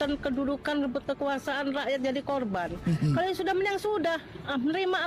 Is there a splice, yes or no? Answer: no